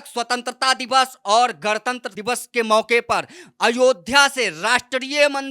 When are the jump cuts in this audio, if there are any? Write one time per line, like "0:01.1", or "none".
0:02.1